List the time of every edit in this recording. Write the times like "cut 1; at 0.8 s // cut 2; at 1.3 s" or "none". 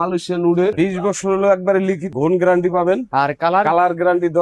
cut 1; at 0.7 s // cut 2; at 2.1 s